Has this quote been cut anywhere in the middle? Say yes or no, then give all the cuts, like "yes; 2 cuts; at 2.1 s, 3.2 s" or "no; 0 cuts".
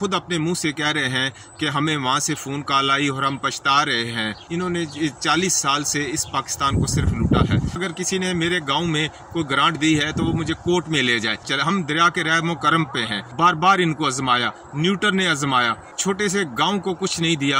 yes; 5 cuts; at 4.4 s, 7.8 s, 11.5 s, 13.2 s, 15.9 s